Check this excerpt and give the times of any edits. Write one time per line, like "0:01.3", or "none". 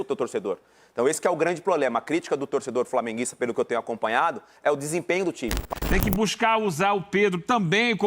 0:05.5